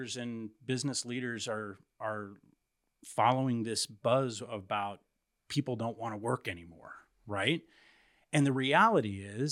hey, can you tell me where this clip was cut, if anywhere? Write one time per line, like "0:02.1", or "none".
none